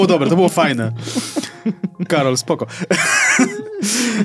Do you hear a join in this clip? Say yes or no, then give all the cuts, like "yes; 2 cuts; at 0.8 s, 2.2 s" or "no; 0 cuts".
no; 0 cuts